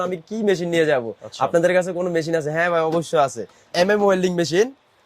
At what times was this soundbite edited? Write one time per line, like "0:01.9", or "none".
0:03.7